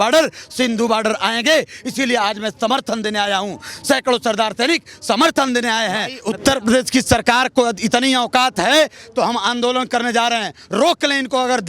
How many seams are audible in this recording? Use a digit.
1